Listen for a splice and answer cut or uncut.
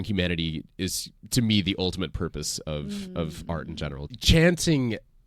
cut